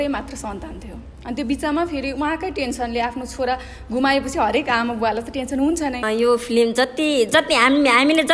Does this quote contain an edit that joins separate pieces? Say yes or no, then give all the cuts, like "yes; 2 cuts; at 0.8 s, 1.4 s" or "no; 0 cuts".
yes; 1 cut; at 6.0 s